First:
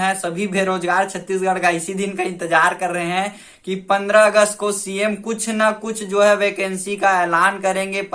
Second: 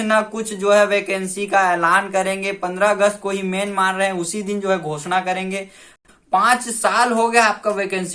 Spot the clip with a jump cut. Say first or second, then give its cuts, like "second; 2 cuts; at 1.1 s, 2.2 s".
second; 1 cut; at 6.0 s